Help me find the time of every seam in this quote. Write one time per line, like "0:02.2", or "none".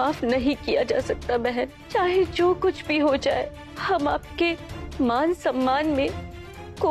0:01.8